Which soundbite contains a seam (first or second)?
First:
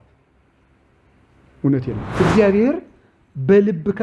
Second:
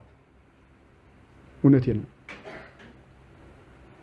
first